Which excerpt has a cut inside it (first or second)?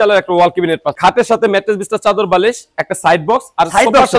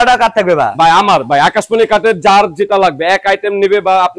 first